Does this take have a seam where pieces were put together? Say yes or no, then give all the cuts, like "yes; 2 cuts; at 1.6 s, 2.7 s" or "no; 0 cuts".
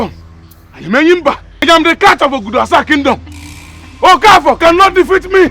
yes; 1 cut; at 1.7 s